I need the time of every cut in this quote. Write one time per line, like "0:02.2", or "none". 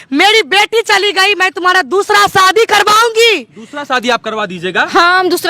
none